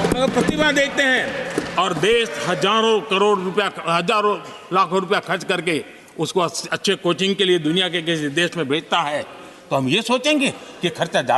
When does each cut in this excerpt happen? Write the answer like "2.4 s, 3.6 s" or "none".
none